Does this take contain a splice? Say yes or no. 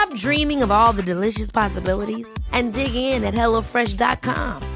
no